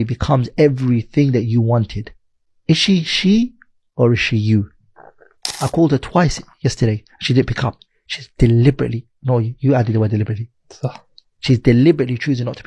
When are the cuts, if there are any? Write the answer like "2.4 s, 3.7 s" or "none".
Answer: 5.5 s